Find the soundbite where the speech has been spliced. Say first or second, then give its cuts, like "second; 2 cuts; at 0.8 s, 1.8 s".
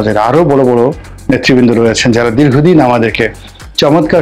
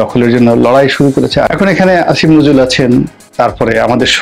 second; 2 cuts; at 1.5 s, 3.2 s